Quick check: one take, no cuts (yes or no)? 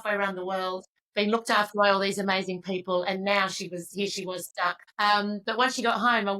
no